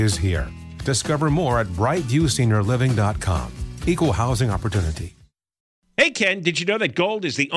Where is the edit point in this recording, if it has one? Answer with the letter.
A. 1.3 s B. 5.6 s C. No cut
B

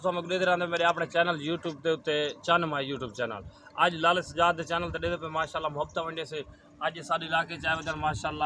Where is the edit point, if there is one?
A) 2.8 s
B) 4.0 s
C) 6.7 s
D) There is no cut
D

